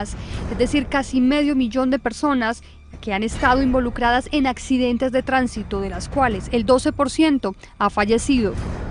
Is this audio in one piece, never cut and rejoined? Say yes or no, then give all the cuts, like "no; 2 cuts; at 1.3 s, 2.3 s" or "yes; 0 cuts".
no; 1 cut; at 7.7 s